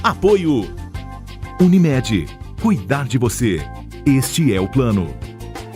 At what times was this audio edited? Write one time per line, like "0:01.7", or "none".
none

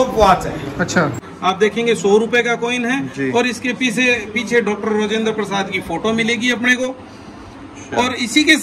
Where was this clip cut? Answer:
0:01.3

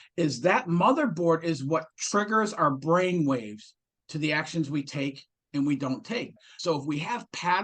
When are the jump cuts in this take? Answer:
0:06.4

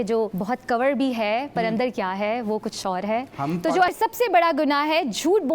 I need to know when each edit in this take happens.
0:03.9

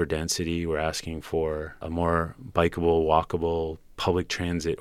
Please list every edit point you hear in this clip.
0:01.8

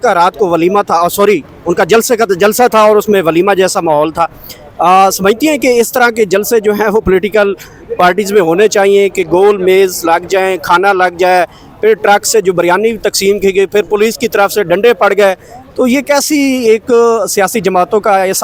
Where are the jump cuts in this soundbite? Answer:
none

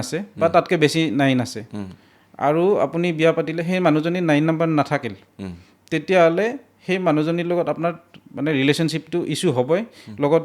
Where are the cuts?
none

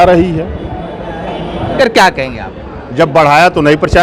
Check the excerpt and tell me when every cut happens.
0:01.8

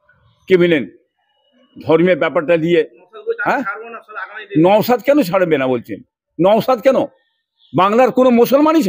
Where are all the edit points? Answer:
0:03.1

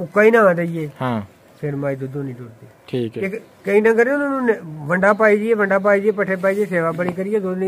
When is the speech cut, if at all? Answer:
0:03.2

